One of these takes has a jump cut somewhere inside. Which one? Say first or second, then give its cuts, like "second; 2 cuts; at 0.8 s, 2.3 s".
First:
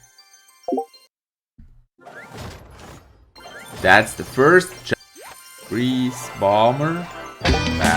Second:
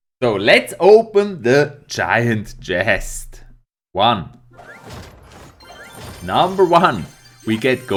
first; 2 cuts; at 3.7 s, 4.8 s